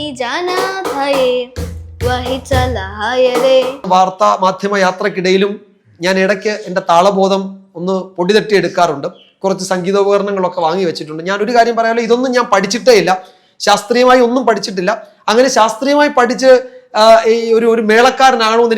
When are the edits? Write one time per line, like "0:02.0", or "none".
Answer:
0:03.8